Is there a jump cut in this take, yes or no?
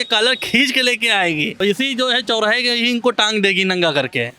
yes